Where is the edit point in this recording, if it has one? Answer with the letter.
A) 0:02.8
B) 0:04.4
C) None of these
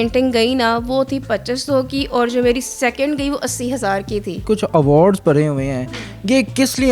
B